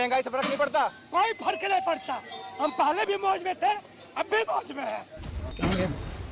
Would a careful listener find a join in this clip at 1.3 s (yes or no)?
no